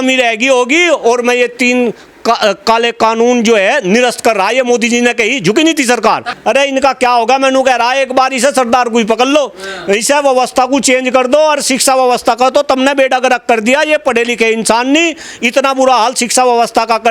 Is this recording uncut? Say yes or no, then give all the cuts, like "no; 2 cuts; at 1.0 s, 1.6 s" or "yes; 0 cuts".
no; 1 cut; at 6.3 s